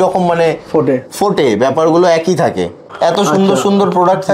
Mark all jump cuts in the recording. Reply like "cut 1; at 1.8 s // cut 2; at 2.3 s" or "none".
cut 1; at 2.8 s